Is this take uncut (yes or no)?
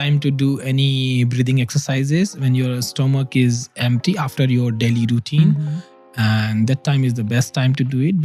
yes